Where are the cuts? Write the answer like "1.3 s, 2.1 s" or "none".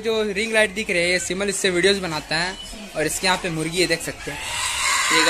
none

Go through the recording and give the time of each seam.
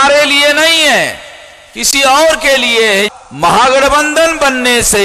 3.2 s

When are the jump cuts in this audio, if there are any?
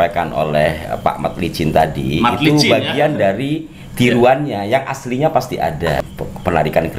6.0 s

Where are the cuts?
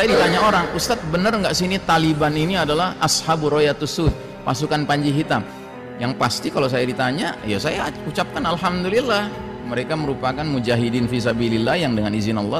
5.6 s

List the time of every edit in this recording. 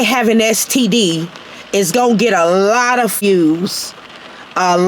3.2 s

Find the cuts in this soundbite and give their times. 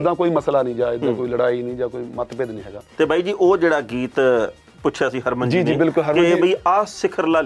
2.9 s

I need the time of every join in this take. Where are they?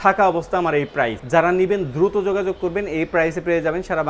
1.2 s

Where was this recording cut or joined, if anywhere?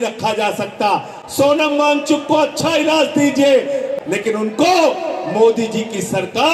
3.9 s

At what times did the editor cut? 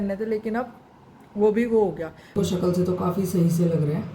2.3 s

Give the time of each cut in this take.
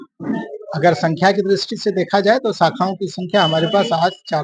none

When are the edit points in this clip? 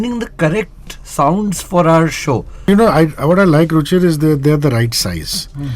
2.7 s

